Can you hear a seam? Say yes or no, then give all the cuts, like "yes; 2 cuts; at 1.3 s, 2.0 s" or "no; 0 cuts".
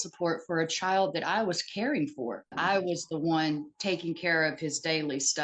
yes; 1 cut; at 2.6 s